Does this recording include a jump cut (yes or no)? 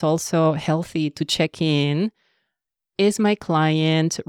no